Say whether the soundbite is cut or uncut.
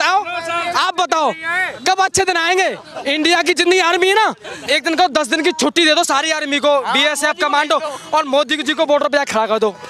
cut